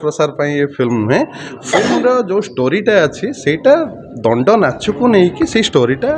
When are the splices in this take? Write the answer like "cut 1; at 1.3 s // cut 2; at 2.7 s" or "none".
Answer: none